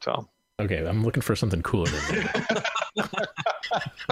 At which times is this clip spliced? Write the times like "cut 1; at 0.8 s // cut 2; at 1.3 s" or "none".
none

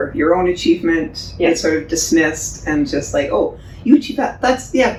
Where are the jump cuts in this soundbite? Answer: none

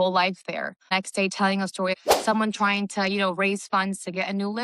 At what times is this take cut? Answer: cut 1; at 0.9 s // cut 2; at 2.0 s

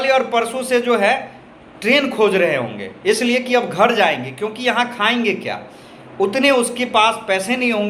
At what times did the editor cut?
none

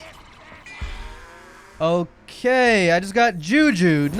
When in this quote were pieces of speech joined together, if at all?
none

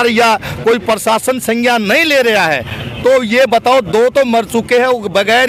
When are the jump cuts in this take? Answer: none

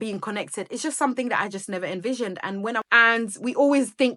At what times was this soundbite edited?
cut 1; at 2.8 s

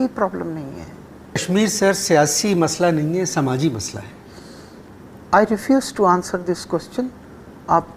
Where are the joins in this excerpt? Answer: cut 1; at 1.4 s

